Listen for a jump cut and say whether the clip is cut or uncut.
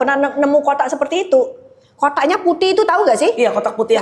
uncut